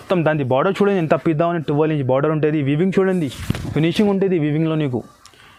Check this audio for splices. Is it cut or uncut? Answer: uncut